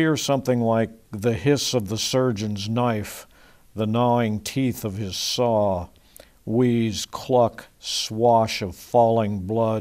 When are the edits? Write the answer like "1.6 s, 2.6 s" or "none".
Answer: 2.0 s